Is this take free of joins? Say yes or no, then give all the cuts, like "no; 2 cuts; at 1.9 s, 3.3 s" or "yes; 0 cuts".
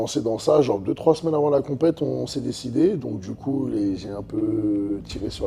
yes; 0 cuts